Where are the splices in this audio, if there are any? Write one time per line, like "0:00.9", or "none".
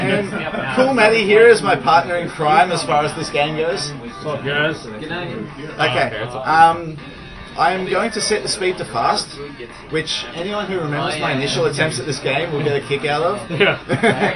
0:10.4